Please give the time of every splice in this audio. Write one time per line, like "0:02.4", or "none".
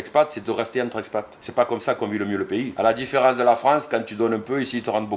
0:01.4
0:02.7